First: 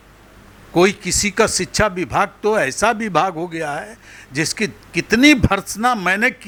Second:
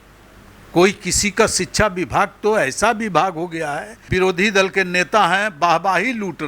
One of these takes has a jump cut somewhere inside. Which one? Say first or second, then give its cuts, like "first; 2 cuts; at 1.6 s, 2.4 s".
second; 1 cut; at 4.0 s